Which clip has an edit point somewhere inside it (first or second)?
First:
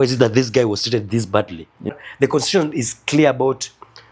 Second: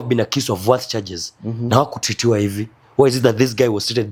first